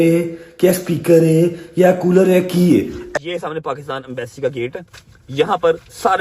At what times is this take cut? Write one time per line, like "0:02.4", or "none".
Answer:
0:03.0